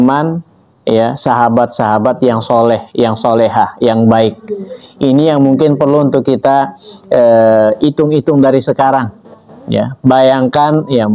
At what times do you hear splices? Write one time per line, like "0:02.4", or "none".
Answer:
none

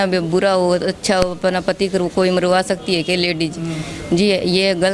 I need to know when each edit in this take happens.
none

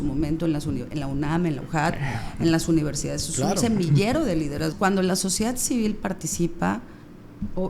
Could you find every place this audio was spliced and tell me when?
0:04.7

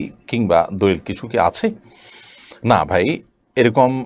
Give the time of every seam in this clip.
none

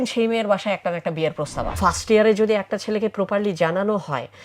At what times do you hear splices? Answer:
0:01.7

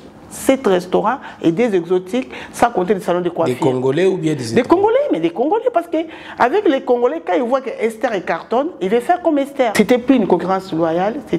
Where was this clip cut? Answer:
0:09.7

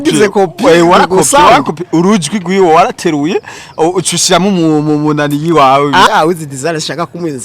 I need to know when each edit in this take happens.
0:06.1

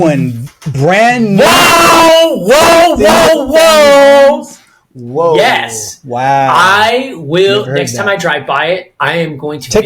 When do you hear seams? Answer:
none

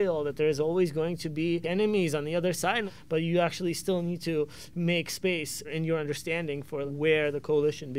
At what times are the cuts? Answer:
0:01.7
0:02.9
0:05.7
0:06.9

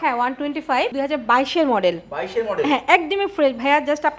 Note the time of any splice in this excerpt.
0:00.9

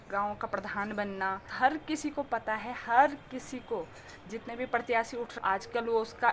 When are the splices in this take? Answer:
0:01.4
0:05.3

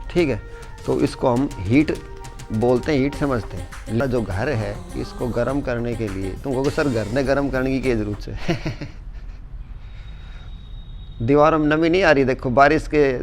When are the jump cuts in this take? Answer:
0:04.0

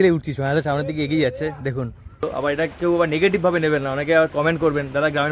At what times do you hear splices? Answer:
0:02.2

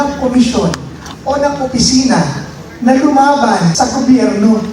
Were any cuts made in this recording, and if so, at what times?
0:03.7

